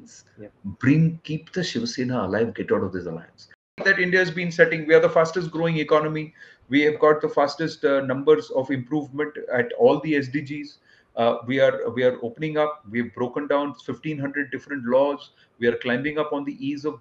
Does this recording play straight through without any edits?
no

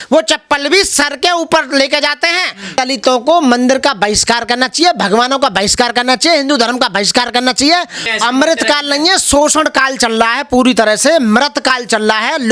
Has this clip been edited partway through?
yes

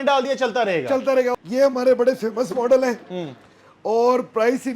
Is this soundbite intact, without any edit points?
no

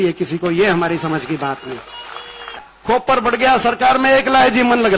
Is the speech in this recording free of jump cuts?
no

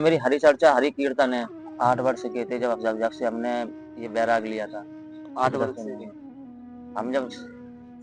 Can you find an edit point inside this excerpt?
yes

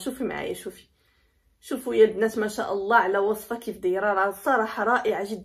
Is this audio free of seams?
yes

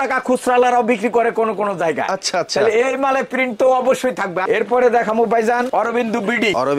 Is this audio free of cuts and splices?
yes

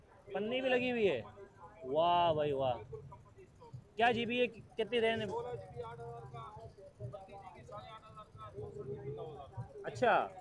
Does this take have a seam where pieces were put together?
no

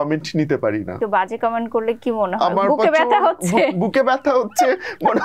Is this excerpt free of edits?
no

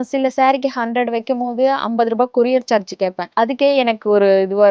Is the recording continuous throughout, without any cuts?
no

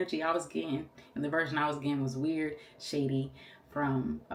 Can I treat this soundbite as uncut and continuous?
yes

